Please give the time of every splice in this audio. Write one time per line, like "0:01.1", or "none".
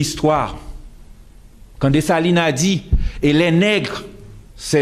0:02.0